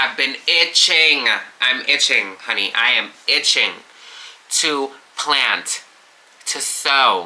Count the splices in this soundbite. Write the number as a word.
zero